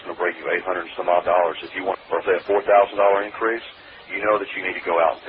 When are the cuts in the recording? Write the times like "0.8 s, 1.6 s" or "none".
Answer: 2.0 s

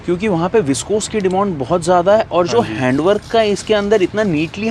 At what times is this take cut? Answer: none

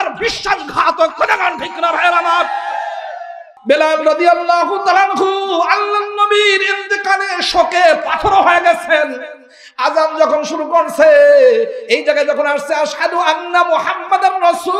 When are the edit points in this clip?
3.5 s

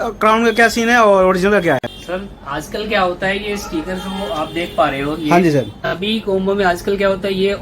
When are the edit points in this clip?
1.9 s, 5.8 s

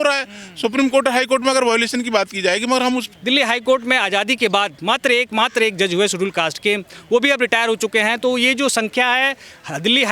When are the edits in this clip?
3.1 s

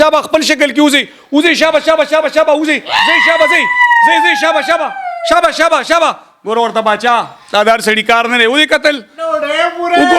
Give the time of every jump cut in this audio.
none

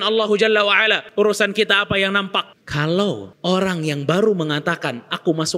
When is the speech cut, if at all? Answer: 1.0 s, 2.6 s, 3.3 s

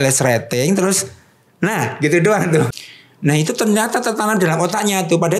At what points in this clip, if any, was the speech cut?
2.7 s

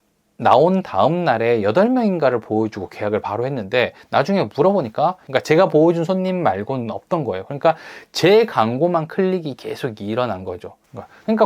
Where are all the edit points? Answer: 5.2 s

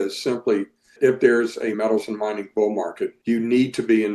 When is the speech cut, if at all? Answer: 0.9 s, 1.8 s, 3.2 s

